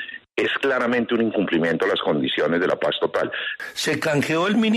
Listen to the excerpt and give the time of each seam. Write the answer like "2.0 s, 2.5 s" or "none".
3.4 s